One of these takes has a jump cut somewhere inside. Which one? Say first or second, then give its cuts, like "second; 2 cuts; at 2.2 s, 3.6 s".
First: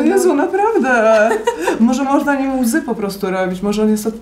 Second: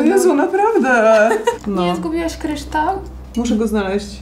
second; 1 cut; at 1.6 s